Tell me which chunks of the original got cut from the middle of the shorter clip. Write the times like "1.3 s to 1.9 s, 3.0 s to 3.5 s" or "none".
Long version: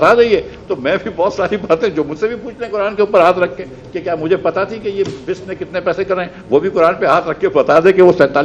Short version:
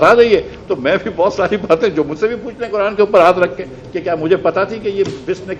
none

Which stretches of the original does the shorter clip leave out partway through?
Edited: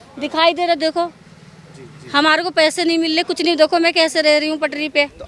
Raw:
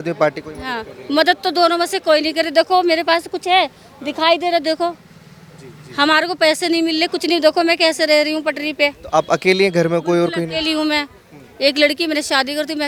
none

